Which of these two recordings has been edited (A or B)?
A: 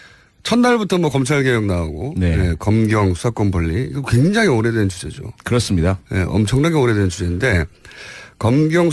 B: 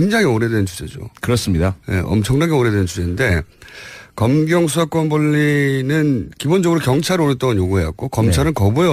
A